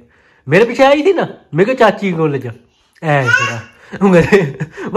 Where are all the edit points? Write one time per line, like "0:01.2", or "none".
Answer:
none